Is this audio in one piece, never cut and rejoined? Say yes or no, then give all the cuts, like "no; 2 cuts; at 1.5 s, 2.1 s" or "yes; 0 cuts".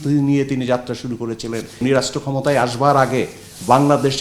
no; 1 cut; at 1.8 s